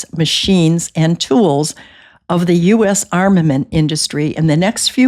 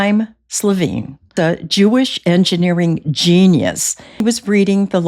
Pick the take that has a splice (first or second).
second